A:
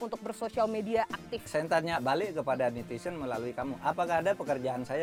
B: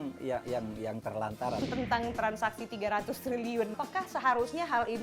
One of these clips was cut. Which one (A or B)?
B